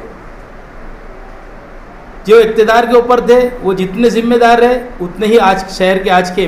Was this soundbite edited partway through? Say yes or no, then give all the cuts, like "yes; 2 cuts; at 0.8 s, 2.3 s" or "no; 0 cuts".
no; 0 cuts